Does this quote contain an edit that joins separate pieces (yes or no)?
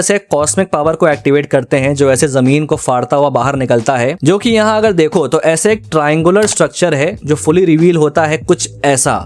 no